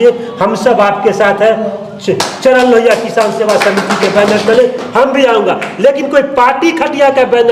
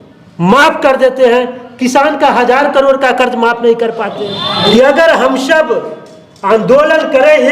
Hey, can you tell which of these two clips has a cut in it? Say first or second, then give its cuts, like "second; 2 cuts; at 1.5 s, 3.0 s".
second; 1 cut; at 4.2 s